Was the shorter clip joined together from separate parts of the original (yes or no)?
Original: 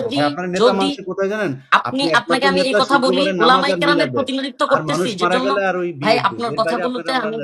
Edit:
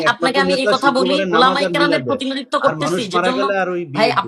no